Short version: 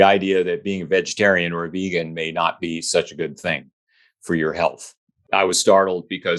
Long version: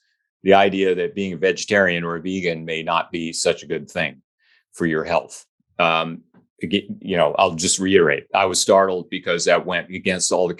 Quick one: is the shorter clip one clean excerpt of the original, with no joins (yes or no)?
no